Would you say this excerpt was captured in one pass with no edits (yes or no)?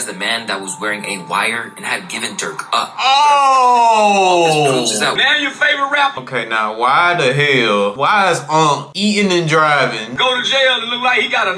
no